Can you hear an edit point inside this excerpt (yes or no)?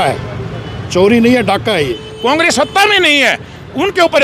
yes